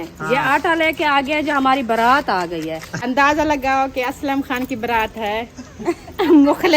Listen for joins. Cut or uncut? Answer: cut